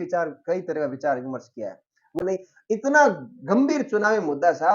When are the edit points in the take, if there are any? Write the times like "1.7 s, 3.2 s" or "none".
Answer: 2.2 s